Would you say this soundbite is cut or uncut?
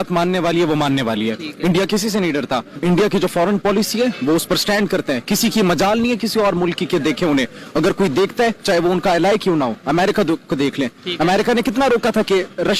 cut